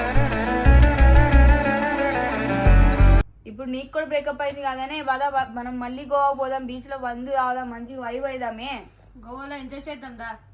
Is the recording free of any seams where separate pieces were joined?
no; 1 cut; at 3.4 s

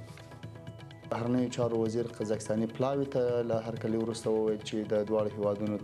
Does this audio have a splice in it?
yes; 1 cut; at 1.1 s

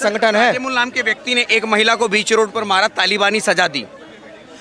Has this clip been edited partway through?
no; 0 cuts

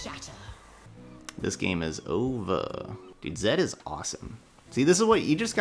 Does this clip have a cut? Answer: no; 0 cuts

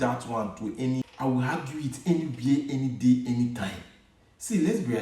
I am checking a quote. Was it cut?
yes; 1 cut; at 1.0 s

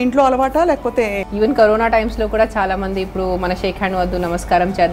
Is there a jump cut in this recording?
yes; 1 cut; at 1.2 s

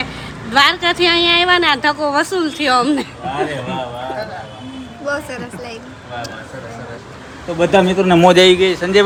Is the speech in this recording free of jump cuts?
yes; 0 cuts

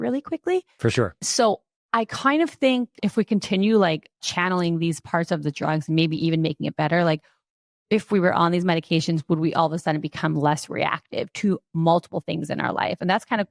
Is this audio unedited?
no; 3 cuts; at 1.1 s, 3.0 s, 4.2 s

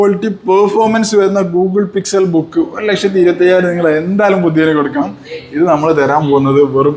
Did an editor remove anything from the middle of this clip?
no; 0 cuts

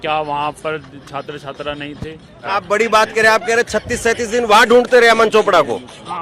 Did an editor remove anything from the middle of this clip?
yes; 1 cut; at 2.5 s

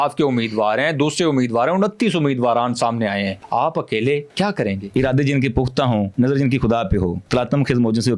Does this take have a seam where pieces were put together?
yes; 4 cuts; at 3.4 s, 4.6 s, 6.1 s, 7.2 s

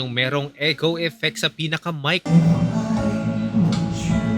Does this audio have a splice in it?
yes; 1 cut; at 2.2 s

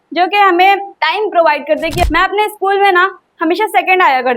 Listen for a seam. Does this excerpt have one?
yes; 2 cuts; at 0.9 s, 2.0 s

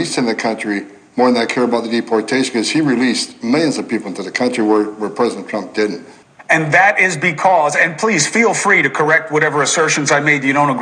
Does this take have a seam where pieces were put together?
no; 0 cuts

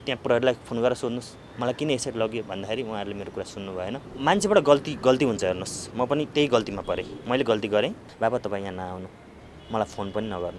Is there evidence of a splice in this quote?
yes; 2 cuts; at 4.1 s, 8.1 s

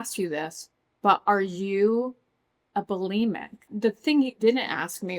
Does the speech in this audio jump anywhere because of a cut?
yes; 1 cut; at 3.7 s

